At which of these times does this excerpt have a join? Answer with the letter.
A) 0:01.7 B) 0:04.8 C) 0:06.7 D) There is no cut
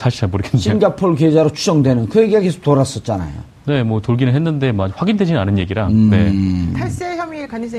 A